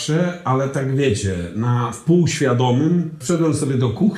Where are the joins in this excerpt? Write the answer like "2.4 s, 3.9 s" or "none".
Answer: 3.2 s